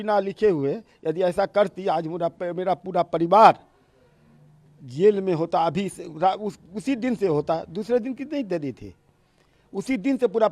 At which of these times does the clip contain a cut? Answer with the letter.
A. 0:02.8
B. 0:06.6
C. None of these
C